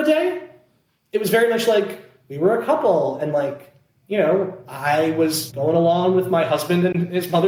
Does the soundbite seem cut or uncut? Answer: uncut